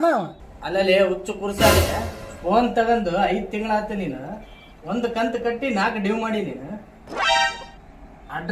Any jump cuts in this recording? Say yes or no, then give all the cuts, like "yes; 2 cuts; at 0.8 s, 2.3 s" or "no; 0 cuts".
no; 0 cuts